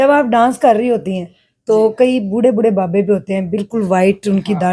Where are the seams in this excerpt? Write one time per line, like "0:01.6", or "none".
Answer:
none